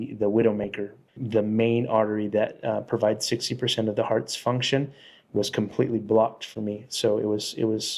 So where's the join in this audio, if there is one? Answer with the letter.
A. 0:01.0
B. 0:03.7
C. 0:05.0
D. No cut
A